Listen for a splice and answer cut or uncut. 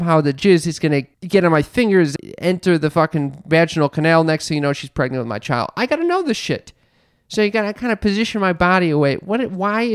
cut